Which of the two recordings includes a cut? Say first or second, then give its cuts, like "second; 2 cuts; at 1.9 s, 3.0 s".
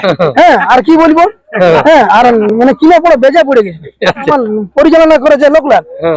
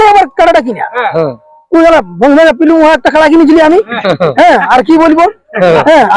first; 1 cut; at 4.3 s